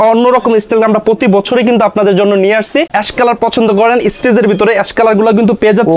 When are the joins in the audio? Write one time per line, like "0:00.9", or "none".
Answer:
0:02.9